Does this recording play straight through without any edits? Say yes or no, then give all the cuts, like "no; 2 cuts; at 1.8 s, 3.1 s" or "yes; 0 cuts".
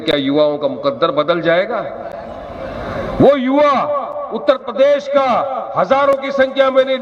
yes; 0 cuts